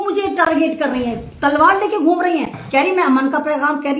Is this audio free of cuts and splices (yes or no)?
yes